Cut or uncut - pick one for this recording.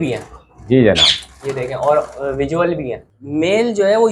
cut